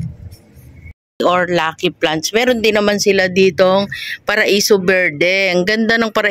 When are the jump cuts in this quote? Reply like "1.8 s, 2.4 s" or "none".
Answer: 1.2 s